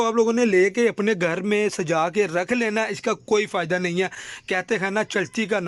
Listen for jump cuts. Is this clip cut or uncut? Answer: uncut